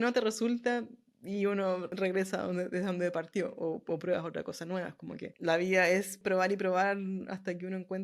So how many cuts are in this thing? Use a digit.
3